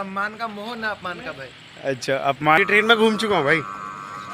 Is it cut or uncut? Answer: cut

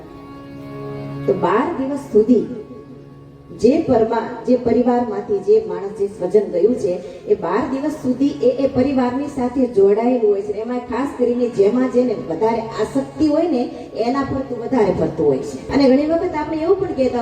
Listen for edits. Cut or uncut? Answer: cut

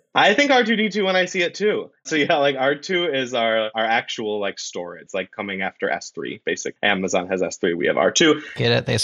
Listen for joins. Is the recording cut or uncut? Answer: cut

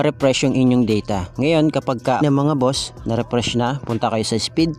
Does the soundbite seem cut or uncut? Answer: cut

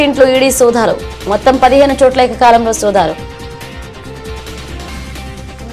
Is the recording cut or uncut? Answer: uncut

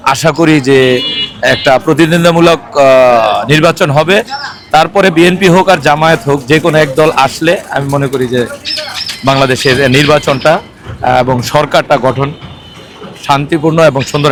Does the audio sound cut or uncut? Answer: uncut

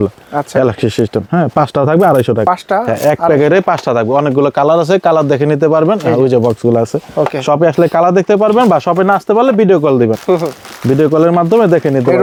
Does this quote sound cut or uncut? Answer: uncut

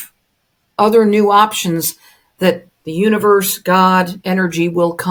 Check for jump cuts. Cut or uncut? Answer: uncut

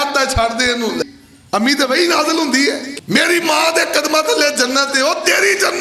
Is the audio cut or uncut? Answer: cut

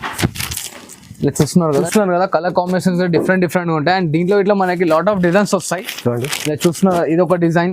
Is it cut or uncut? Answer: cut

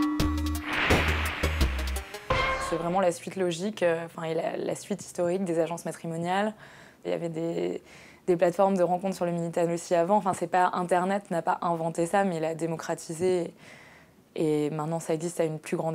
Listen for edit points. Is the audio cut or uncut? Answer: uncut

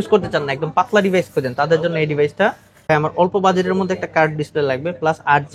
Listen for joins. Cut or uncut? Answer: cut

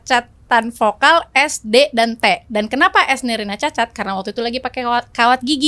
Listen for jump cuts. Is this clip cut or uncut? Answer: uncut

